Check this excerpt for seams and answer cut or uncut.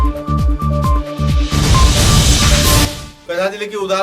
cut